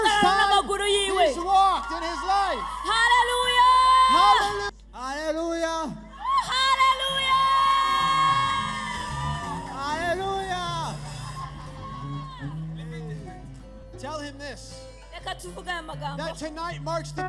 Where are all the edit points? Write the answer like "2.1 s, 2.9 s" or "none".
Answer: 4.6 s, 13.8 s